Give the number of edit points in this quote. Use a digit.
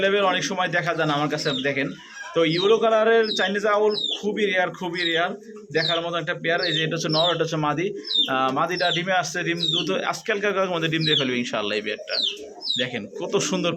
0